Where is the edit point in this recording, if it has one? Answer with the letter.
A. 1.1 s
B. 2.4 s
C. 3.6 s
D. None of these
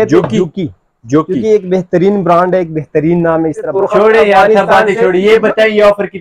C